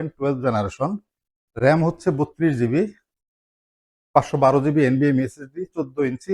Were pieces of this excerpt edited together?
no; 0 cuts

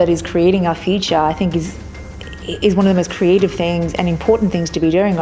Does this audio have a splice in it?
no; 0 cuts

